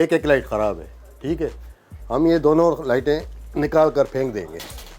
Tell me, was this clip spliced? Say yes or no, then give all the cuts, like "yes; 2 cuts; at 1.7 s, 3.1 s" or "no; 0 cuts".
no; 0 cuts